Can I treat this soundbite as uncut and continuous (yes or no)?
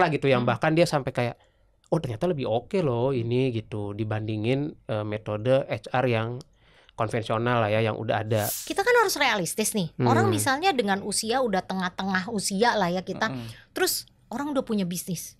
no